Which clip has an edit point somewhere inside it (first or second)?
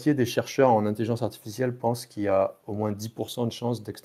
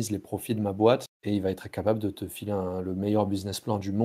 second